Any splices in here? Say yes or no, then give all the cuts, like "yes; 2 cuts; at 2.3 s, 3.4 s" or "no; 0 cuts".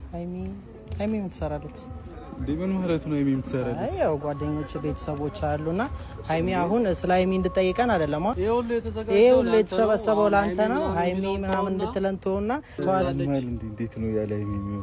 no; 0 cuts